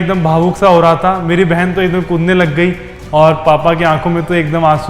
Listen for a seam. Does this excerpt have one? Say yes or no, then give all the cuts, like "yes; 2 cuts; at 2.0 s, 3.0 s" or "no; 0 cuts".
yes; 1 cut; at 2.9 s